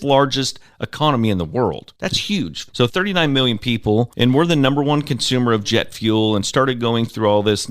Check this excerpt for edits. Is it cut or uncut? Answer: cut